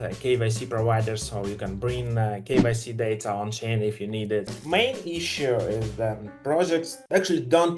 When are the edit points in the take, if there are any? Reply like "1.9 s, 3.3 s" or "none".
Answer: 4.6 s